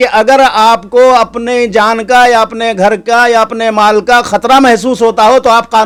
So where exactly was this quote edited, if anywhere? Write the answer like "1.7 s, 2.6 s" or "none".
none